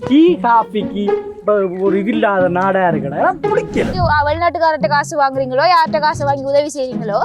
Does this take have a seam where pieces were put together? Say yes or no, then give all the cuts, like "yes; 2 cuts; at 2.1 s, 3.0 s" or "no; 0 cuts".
yes; 1 cut; at 3.9 s